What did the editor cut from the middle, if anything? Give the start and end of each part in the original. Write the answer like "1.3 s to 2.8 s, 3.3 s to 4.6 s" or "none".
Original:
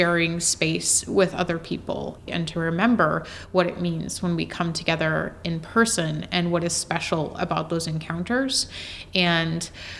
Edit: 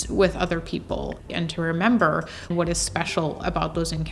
3.5 s to 6.5 s